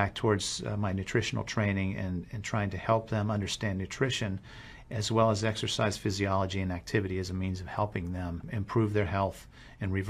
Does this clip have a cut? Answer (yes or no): no